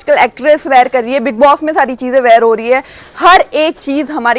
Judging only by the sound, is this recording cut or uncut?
uncut